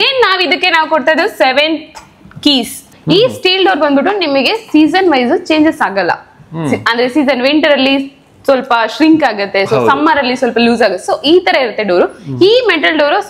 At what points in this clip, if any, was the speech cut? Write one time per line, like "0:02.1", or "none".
0:02.8